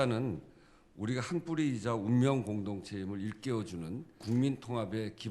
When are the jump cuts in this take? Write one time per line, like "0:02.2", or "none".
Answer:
0:04.2